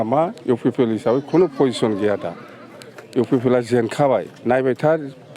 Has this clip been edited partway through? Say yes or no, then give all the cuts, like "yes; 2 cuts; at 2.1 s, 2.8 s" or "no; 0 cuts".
no; 0 cuts